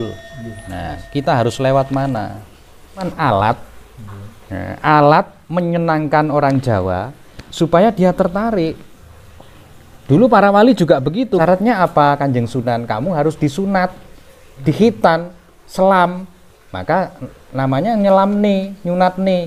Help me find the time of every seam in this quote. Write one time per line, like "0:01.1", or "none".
0:03.1
0:11.4